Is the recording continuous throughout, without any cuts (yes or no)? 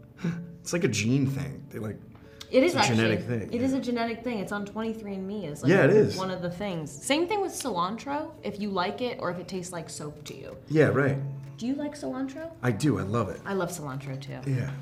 yes